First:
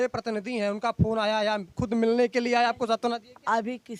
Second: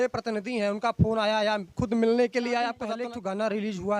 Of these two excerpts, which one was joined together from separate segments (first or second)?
second